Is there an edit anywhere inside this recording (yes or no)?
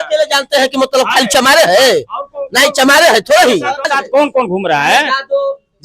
yes